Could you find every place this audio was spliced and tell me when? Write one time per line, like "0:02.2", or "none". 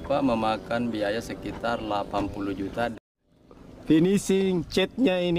0:02.9